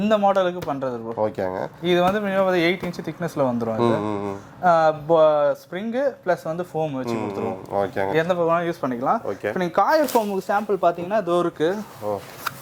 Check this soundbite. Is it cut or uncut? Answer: uncut